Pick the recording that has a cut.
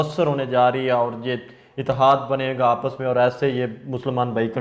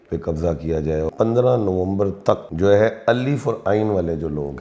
second; 2 cuts; at 1.1 s, 2.5 s

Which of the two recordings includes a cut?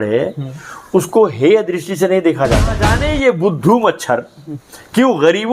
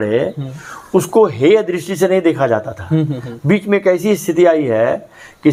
first; 1 cut; at 2.9 s

